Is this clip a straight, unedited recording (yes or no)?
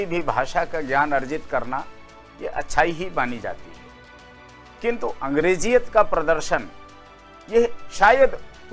yes